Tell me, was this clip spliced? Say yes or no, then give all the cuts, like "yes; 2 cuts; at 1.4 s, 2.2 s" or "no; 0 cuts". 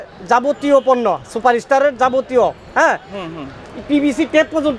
no; 0 cuts